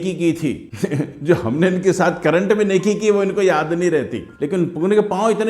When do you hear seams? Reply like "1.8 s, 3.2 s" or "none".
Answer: 4.3 s